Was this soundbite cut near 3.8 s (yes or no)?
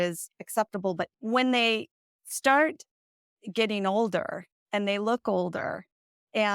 no